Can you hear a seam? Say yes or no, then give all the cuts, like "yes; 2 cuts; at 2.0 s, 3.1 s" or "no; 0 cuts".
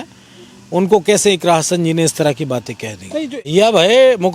yes; 1 cut; at 3.4 s